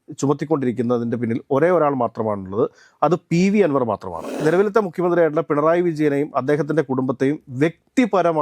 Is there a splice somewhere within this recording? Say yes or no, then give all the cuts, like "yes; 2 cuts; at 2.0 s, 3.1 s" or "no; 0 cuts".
yes; 1 cut; at 4.3 s